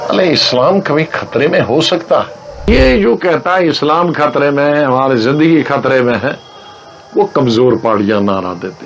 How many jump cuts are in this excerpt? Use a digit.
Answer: 1